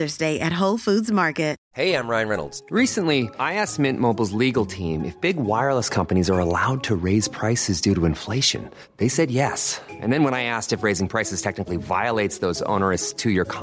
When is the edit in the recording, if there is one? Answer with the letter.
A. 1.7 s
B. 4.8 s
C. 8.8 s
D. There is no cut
A